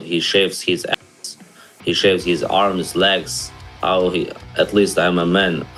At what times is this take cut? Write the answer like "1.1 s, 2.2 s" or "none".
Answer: none